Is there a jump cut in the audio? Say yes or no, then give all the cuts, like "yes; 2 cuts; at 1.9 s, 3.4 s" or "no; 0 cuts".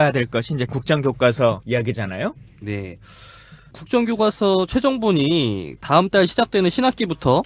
no; 0 cuts